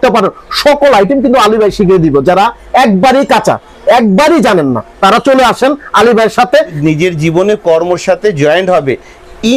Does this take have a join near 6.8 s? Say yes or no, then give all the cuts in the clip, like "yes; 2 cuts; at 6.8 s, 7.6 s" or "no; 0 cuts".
yes; 1 cut; at 6.8 s